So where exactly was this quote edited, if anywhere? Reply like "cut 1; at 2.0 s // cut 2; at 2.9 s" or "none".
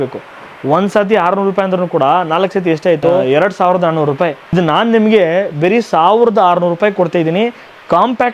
cut 1; at 3.2 s // cut 2; at 4.5 s